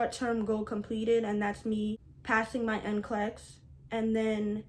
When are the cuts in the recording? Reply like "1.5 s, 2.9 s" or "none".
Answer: 2.1 s

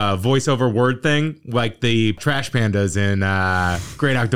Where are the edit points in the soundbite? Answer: 2.2 s

